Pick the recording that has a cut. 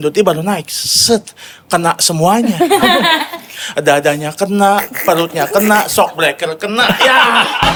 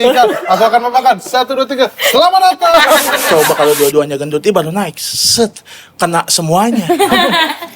second; 1 cut; at 3.2 s

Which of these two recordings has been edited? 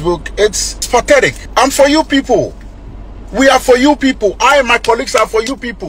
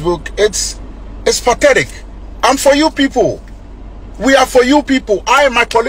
first; 2 cuts; at 0.9 s, 1.4 s

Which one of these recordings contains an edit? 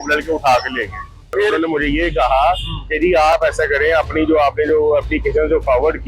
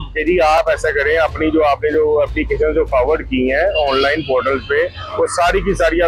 first; 1 cut; at 1.2 s

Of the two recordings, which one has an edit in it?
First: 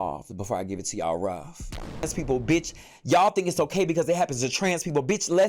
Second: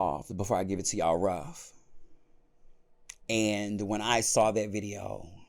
first; 1 cut; at 2.0 s

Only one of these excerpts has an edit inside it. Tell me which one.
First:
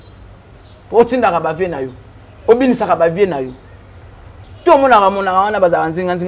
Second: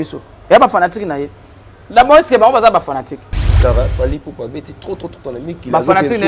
second; 1 cut; at 3.5 s

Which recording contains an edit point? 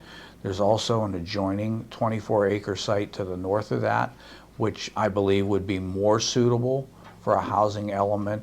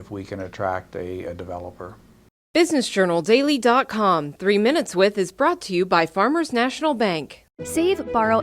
second; 1 cut; at 2.1 s

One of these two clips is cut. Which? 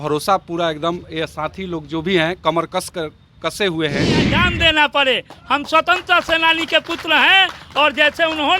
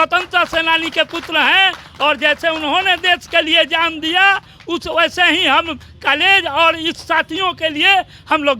first; 1 cut; at 4.3 s

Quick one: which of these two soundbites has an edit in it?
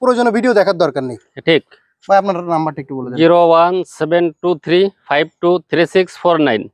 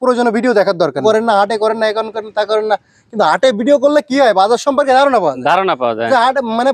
second; 1 cut; at 1.0 s

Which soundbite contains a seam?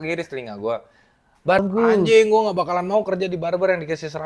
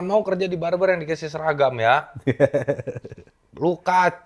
first; 1 cut; at 1.6 s

